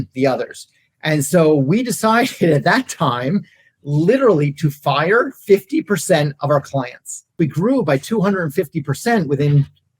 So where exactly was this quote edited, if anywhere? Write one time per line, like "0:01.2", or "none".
0:07.3